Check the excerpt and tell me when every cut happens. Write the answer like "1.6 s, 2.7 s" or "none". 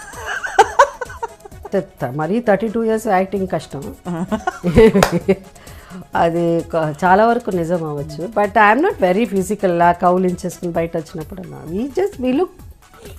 1.7 s